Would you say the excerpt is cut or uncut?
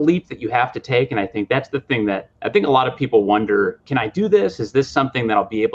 cut